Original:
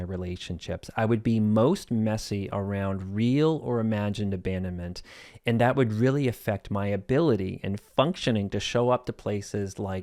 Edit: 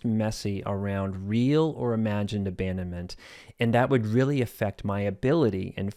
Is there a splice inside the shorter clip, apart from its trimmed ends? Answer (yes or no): no